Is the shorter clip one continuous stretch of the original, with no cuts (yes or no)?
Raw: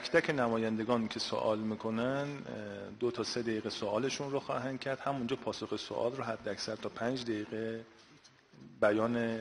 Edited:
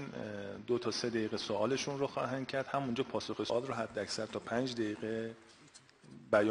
no